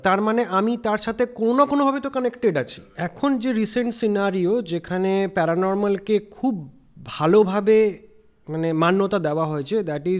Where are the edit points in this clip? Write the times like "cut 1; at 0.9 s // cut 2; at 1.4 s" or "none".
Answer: cut 1; at 2.8 s